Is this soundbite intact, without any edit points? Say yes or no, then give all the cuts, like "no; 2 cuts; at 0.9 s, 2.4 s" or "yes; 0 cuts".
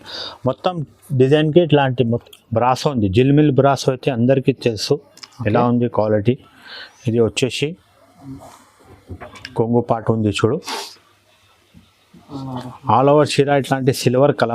no; 1 cut; at 2.2 s